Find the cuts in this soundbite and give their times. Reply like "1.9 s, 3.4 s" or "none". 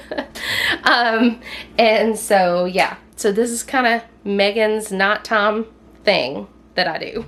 none